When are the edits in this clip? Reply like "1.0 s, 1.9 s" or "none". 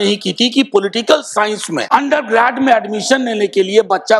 1.9 s